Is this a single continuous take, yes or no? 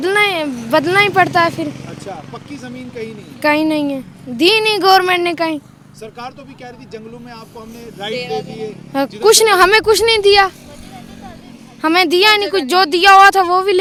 yes